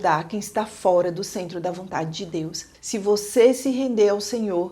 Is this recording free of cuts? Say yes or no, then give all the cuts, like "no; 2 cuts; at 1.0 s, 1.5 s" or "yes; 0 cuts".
no; 1 cut; at 2.7 s